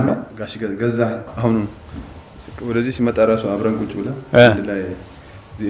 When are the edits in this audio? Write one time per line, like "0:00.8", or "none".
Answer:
0:01.3